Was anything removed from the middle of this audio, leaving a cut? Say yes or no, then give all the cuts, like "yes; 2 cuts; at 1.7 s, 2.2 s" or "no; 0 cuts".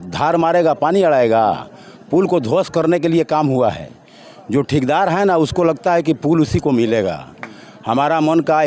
no; 0 cuts